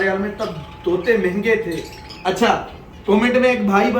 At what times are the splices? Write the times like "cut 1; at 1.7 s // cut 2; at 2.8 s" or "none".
cut 1; at 2.0 s